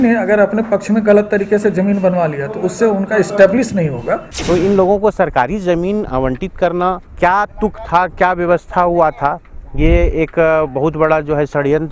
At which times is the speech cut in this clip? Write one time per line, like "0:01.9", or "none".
0:04.3
0:07.1

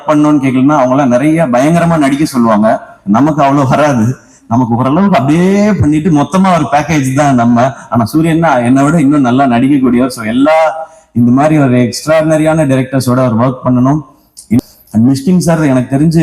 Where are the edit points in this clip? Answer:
0:14.6

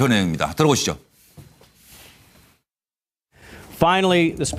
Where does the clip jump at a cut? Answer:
0:01.6

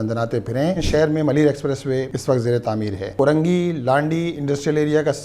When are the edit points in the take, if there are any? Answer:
0:00.8
0:02.1
0:03.1

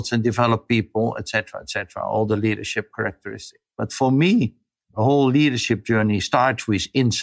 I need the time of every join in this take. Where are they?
0:04.7
0:06.2

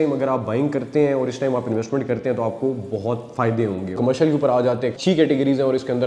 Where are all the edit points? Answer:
0:04.0
0:05.0

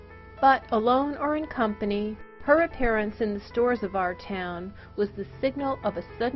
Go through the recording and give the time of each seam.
0:02.2

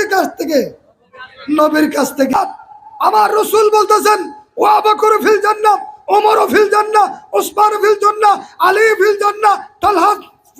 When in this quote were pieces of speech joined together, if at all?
0:02.3

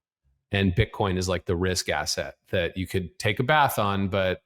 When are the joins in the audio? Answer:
none

